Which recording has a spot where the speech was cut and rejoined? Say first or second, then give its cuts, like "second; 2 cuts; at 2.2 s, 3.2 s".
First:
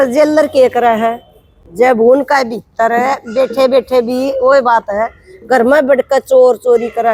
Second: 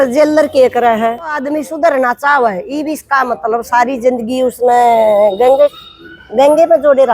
second; 1 cut; at 1.4 s